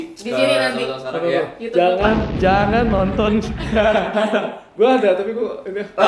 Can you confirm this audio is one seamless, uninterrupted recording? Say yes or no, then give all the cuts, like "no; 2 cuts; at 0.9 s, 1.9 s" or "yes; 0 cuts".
yes; 0 cuts